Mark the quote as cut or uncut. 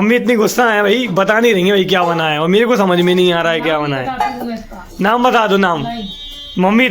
cut